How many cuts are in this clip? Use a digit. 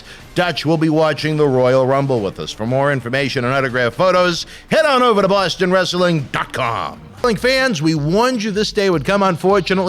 1